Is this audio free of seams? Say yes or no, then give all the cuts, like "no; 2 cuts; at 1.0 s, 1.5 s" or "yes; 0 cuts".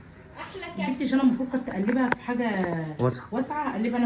yes; 0 cuts